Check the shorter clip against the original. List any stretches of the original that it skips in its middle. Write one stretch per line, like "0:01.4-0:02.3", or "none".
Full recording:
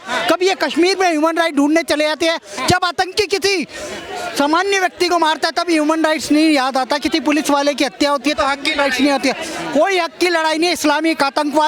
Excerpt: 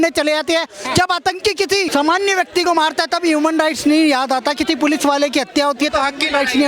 0:03.6-0:04.3